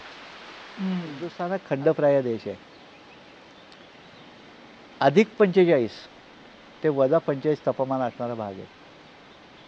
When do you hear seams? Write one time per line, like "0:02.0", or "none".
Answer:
0:01.5